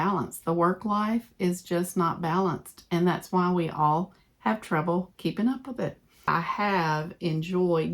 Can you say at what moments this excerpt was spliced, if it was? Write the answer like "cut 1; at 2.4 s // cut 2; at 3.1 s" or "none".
cut 1; at 6.3 s